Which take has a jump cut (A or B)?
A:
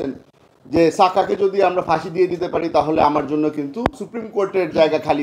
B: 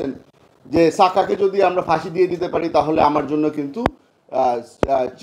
A